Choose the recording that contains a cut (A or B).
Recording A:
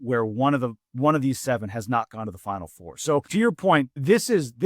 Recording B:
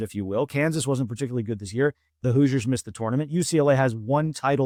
A